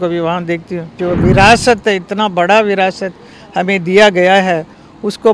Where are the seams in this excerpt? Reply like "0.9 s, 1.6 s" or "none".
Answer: 0.9 s